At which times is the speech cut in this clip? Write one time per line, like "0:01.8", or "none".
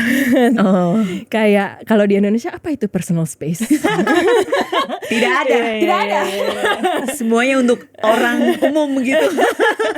none